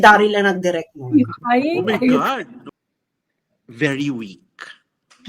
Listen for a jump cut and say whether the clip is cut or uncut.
cut